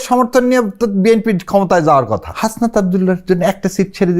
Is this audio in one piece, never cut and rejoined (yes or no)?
no